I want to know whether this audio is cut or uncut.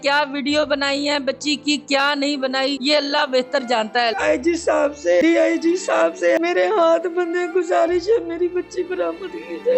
cut